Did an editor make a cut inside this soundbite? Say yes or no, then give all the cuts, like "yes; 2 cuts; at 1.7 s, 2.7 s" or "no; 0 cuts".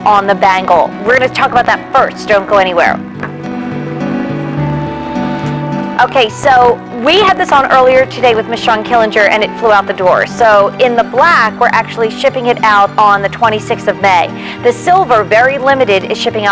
no; 0 cuts